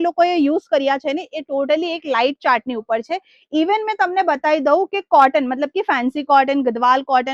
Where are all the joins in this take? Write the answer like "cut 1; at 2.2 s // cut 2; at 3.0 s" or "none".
none